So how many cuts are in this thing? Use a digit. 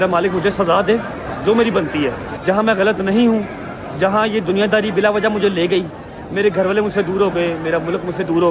1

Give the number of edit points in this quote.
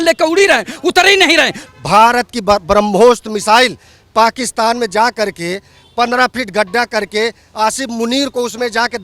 1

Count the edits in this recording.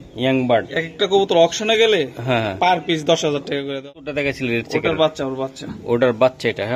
1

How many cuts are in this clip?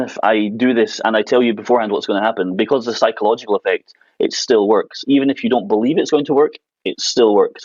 0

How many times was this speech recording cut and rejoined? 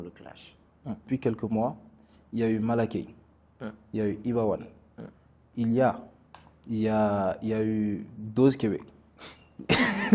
1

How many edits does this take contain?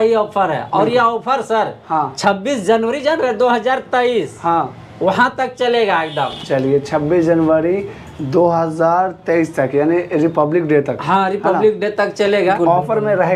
0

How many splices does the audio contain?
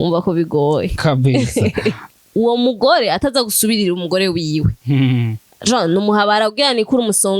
1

